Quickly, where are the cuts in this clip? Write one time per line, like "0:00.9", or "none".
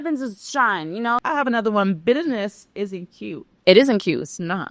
0:01.2